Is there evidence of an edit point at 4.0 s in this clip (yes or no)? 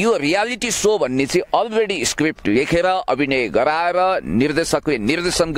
no